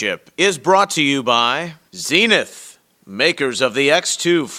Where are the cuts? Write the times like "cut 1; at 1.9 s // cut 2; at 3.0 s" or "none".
cut 1; at 1.7 s

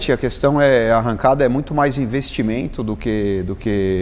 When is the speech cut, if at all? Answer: none

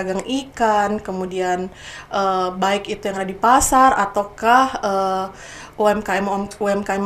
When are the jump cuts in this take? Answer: none

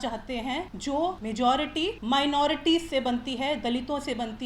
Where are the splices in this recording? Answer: cut 1; at 1.0 s // cut 2; at 2.0 s

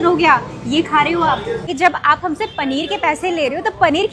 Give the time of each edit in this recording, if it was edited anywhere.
cut 1; at 1.7 s

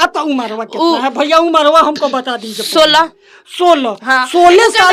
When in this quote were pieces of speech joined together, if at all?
none

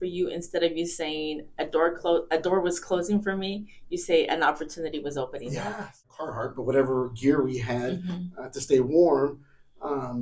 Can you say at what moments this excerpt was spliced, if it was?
cut 1; at 6.1 s

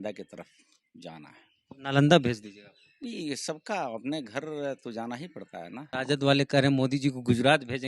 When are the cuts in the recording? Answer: cut 1; at 5.9 s

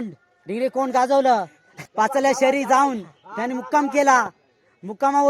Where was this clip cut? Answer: cut 1; at 1.8 s

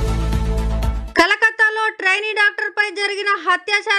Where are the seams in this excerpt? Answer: cut 1; at 1.0 s

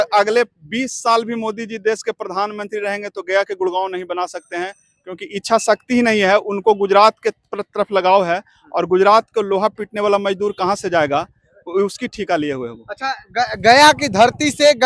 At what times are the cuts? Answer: none

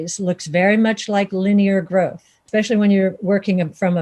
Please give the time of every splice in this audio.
cut 1; at 2.4 s

